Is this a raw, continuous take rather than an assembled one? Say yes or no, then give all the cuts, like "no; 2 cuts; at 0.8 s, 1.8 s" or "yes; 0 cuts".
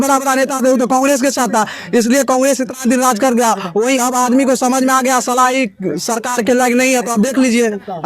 yes; 0 cuts